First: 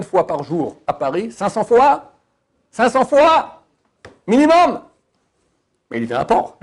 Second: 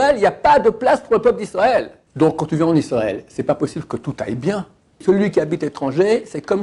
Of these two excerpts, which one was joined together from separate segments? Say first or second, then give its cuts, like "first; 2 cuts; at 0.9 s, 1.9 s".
second; 2 cuts; at 2.0 s, 5.0 s